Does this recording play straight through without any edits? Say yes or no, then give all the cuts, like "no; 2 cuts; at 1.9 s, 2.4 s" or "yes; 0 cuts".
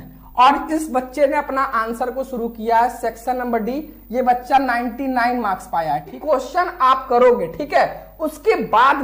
no; 1 cut; at 6.2 s